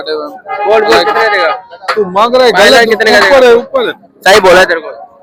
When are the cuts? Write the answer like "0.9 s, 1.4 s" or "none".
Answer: none